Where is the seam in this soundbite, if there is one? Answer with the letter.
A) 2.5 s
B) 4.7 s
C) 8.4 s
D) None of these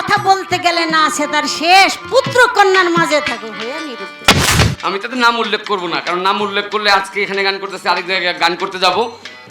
B